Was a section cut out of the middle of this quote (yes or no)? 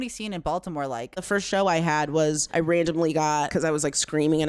yes